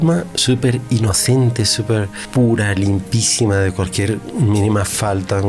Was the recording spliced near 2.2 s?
yes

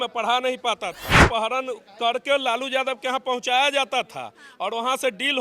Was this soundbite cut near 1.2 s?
yes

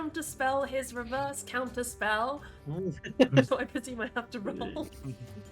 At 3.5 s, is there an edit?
yes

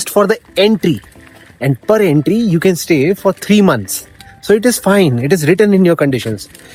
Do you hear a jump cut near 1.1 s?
no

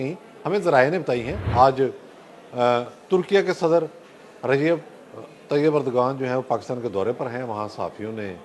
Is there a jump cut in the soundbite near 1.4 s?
yes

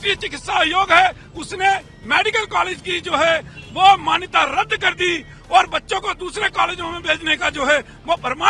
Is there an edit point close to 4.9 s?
no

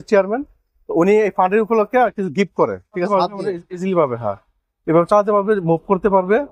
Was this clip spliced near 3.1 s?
yes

